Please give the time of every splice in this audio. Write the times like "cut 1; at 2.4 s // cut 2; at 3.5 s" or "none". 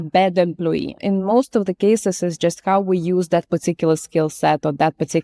cut 1; at 1.0 s